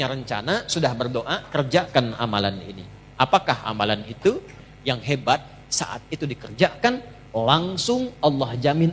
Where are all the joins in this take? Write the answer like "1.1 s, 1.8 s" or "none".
4.6 s